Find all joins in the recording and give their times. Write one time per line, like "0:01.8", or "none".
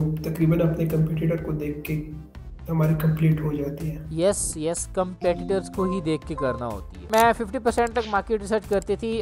0:06.9